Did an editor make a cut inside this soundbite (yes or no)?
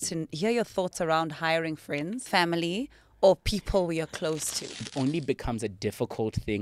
yes